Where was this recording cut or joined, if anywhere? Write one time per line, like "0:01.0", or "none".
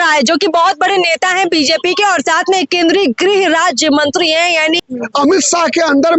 0:05.0